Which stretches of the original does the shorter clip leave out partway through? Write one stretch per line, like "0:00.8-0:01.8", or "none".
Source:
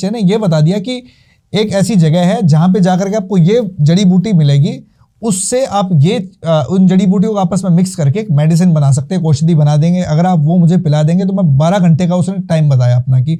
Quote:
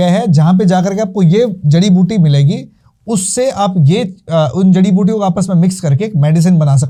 none